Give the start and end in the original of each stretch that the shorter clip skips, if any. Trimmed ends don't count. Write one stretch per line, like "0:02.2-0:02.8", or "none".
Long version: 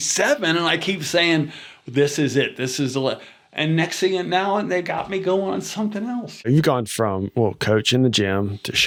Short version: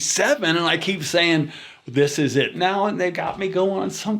0:02.5-0:04.3